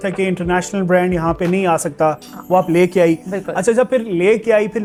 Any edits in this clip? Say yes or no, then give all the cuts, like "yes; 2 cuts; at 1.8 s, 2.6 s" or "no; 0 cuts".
no; 0 cuts